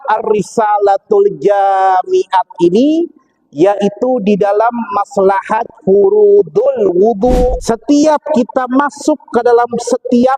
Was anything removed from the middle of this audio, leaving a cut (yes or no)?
yes